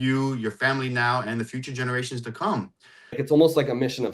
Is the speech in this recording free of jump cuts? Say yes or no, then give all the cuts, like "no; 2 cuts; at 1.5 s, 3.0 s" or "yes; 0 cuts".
no; 1 cut; at 3.2 s